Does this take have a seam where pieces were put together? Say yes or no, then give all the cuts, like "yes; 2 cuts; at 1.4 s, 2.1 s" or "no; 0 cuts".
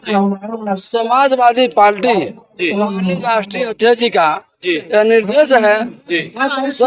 no; 0 cuts